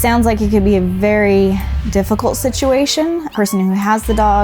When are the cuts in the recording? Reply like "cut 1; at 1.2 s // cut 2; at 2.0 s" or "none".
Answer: cut 1; at 1.7 s // cut 2; at 3.3 s